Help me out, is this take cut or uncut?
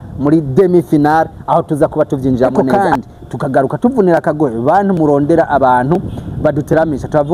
cut